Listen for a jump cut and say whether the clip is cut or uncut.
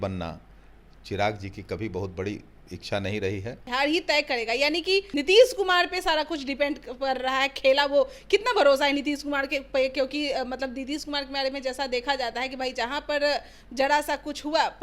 cut